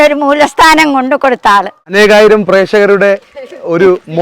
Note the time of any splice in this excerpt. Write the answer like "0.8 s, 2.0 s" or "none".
1.8 s